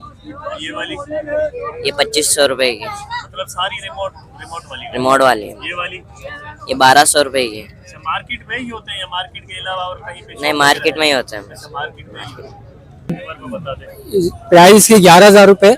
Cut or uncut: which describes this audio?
cut